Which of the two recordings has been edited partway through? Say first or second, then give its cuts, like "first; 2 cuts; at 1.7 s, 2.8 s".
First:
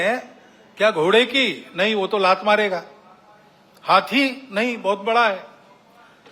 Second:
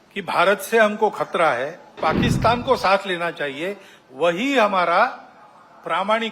second; 1 cut; at 2.0 s